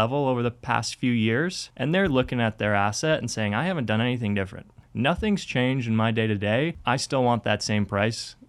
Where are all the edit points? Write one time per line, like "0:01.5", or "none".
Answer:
0:01.7
0:04.8
0:06.8